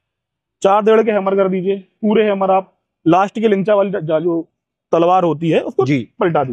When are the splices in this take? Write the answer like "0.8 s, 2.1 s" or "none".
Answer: none